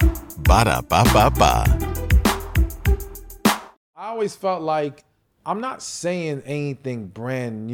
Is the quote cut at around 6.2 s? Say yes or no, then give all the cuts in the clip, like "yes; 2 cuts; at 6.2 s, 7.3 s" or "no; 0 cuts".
no; 1 cut; at 4.1 s